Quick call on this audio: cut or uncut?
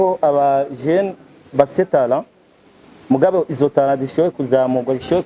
uncut